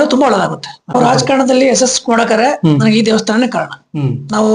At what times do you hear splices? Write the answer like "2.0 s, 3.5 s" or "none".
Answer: 0.9 s